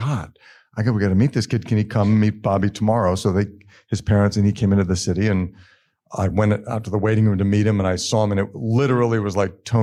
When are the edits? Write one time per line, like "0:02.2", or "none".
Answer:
none